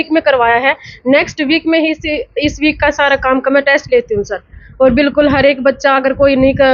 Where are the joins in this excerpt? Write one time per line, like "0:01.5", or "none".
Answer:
none

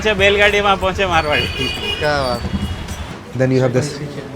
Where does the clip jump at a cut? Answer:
0:03.0

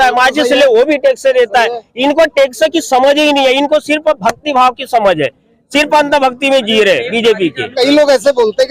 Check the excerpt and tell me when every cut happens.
0:07.6

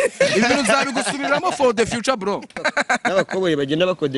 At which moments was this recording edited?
0:02.6

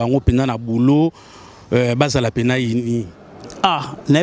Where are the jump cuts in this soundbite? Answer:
0:03.2

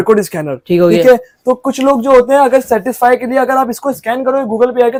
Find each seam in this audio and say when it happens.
none

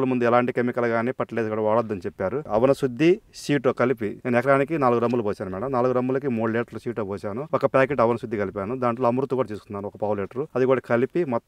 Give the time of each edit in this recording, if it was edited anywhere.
0:02.4

